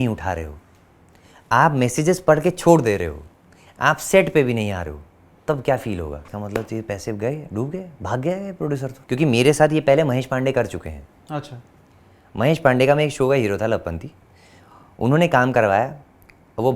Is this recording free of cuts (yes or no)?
no